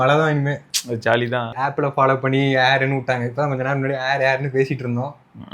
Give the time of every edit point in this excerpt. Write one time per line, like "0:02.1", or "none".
0:01.6

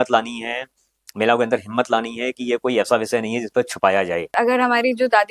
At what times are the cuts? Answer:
0:04.3

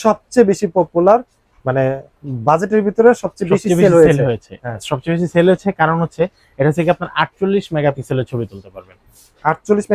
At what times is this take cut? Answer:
none

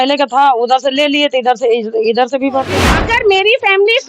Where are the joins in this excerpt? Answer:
0:03.0

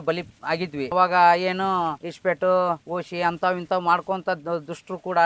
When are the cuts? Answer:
0:00.9

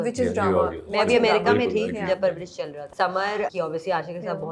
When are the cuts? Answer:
0:02.8
0:03.5

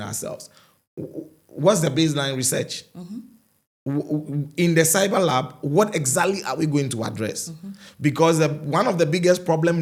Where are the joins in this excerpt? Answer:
none

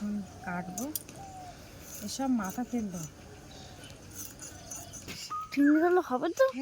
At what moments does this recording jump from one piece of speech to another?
0:05.1

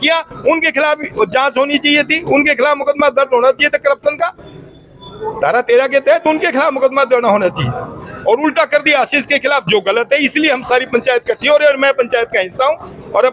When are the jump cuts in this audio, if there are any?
none

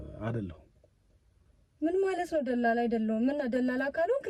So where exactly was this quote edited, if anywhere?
none

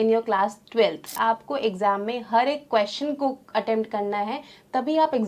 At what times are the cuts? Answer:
0:00.9

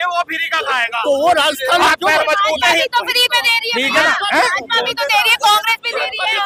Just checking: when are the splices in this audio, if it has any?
none

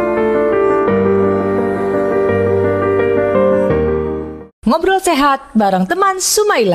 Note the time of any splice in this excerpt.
none

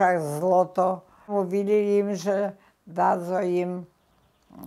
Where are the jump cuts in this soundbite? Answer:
0:01.3

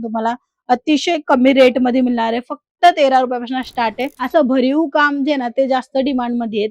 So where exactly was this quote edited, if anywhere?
0:04.2

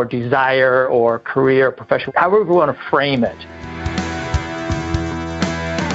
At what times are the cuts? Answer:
0:02.1
0:03.6

